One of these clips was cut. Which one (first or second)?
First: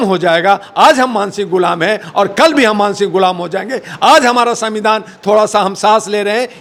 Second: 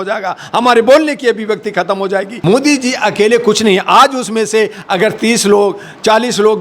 second